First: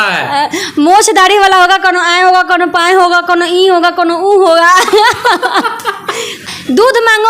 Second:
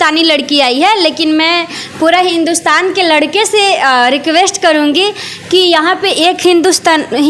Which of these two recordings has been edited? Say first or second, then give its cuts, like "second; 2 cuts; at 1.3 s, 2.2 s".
first; 1 cut; at 6.3 s